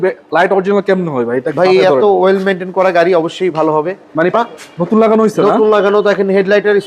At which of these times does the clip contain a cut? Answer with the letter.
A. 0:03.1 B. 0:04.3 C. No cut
B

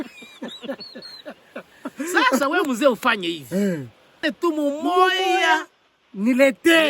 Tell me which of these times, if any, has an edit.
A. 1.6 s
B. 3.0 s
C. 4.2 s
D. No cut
C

